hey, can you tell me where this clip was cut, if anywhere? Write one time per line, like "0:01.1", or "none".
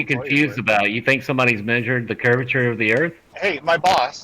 0:03.3